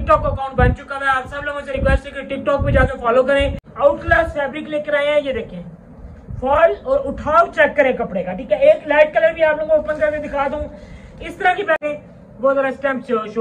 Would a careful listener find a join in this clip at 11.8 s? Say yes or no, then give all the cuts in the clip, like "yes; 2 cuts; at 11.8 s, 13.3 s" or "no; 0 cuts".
yes; 2 cuts; at 3.6 s, 11.8 s